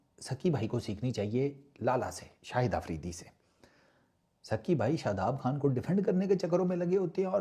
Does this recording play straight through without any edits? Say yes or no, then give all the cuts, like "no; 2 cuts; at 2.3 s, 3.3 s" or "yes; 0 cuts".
yes; 0 cuts